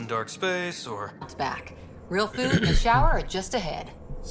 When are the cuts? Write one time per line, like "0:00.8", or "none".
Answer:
none